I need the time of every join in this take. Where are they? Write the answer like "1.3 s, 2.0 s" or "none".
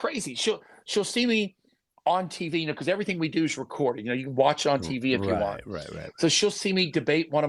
none